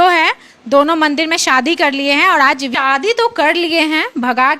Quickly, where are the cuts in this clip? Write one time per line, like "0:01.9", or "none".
0:02.7